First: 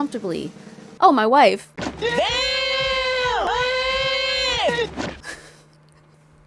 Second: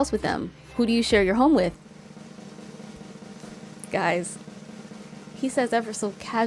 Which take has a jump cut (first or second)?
first